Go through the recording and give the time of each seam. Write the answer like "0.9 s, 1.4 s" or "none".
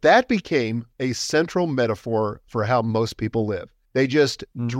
0.8 s, 3.7 s